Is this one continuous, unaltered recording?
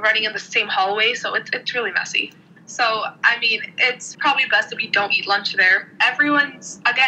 no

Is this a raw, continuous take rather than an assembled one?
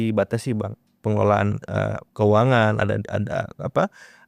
yes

